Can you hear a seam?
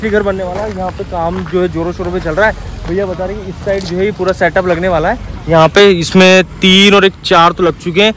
no; 0 cuts

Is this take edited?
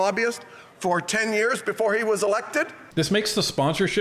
yes; 1 cut; at 2.8 s

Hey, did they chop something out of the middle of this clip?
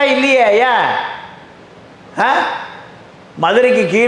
no; 0 cuts

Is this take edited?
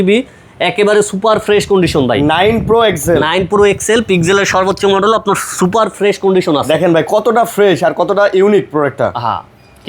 no; 0 cuts

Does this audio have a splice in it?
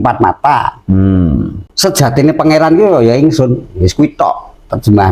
yes; 1 cut; at 1.6 s

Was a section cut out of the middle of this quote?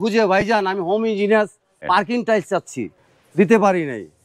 yes; 2 cuts; at 1.8 s, 2.9 s

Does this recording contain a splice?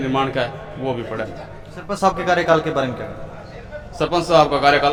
no; 0 cuts

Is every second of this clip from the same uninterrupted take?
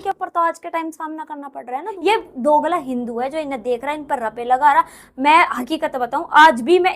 no; 1 cut; at 1.9 s

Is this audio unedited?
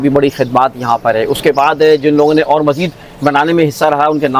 yes; 0 cuts

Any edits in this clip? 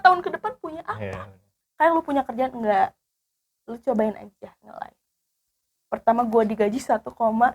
yes; 1 cut; at 1.6 s

